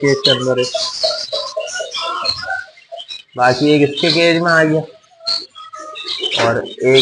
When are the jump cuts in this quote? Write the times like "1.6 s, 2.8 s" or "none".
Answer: 3.2 s